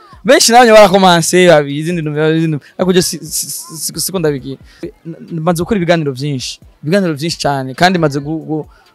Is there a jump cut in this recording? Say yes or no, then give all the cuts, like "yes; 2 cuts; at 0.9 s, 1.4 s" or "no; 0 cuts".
yes; 1 cut; at 5.0 s